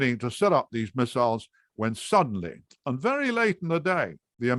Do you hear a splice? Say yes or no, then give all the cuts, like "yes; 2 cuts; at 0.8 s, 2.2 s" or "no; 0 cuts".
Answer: no; 0 cuts